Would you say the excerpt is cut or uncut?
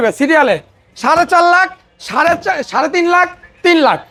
uncut